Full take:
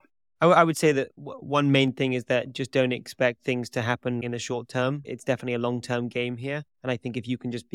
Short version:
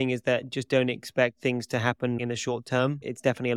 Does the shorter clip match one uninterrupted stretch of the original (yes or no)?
yes